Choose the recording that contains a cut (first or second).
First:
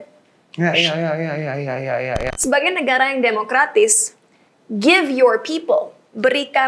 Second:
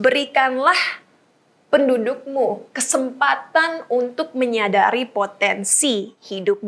first